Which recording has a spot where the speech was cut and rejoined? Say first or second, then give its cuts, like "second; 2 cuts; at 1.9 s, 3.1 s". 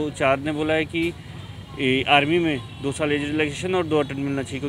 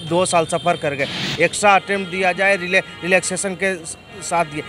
second; 1 cut; at 1.3 s